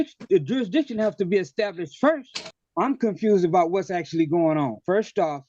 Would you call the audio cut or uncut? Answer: cut